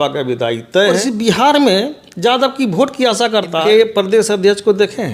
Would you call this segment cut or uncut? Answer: cut